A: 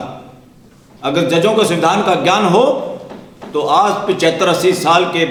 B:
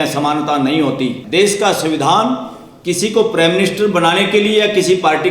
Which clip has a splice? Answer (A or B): B